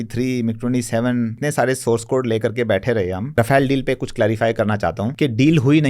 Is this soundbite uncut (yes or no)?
no